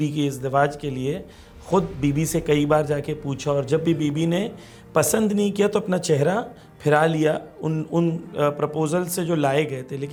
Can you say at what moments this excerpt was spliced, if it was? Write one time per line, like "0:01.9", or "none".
none